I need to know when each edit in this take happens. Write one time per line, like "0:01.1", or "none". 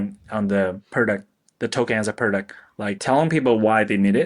0:00.8
0:03.0